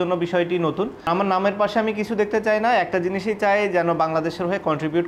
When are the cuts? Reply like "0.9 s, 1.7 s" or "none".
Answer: 1.1 s